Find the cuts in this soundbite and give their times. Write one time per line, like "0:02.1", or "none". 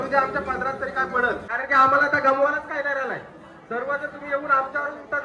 0:01.5